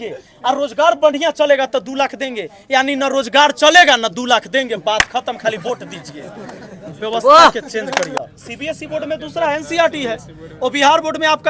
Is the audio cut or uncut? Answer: cut